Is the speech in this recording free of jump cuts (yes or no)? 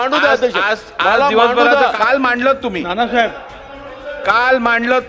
no